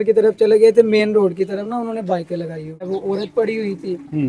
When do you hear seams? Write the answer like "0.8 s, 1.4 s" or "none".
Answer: 2.9 s